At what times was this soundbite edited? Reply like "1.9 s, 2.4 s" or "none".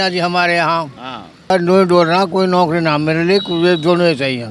1.5 s